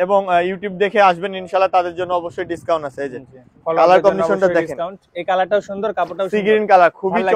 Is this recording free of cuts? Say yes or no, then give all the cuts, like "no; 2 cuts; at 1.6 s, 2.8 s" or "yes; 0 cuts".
yes; 0 cuts